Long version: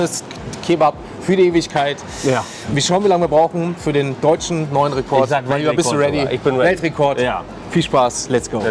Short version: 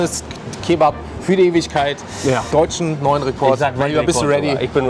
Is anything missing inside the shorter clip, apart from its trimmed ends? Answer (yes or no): yes